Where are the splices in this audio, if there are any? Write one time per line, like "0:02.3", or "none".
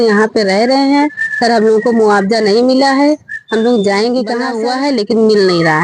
0:04.5